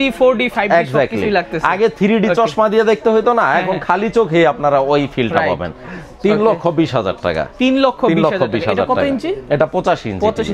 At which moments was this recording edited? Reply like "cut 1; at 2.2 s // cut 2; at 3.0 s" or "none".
none